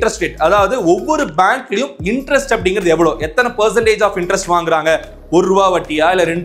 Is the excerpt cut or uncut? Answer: uncut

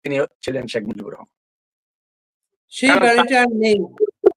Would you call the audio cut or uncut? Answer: uncut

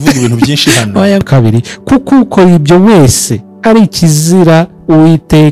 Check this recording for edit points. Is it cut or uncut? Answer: cut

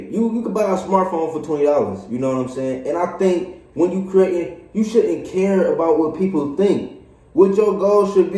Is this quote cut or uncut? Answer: uncut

